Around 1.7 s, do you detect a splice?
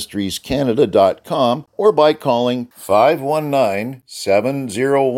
yes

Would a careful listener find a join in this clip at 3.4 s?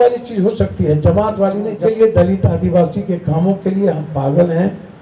no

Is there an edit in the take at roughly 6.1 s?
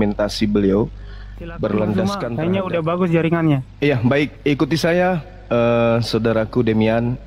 no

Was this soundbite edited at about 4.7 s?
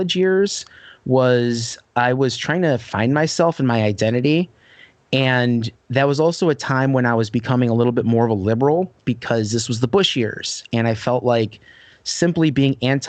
no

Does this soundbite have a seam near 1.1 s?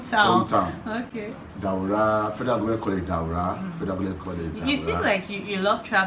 no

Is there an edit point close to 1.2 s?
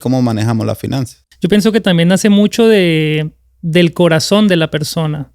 yes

